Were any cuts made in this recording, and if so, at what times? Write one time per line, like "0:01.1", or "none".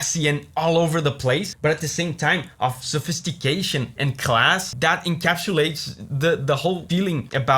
0:01.5
0:04.7